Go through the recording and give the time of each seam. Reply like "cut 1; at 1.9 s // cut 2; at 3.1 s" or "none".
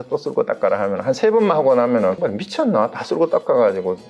cut 1; at 2.2 s